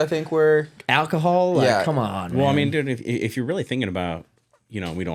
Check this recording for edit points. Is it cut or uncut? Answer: uncut